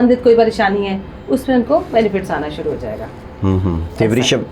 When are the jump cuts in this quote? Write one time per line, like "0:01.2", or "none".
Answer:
none

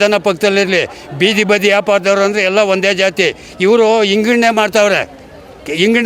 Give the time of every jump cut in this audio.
none

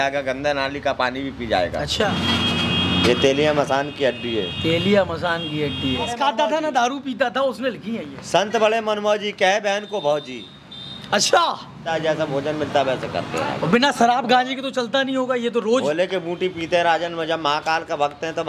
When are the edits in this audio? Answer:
0:02.1
0:06.1
0:11.9

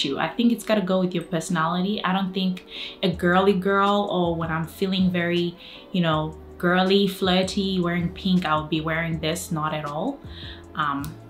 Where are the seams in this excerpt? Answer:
none

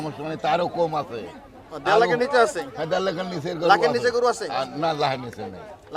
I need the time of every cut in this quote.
none

